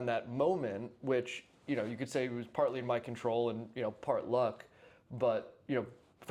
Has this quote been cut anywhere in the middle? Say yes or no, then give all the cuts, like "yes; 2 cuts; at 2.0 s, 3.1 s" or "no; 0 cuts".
no; 0 cuts